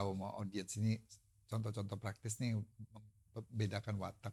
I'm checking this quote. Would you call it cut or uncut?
uncut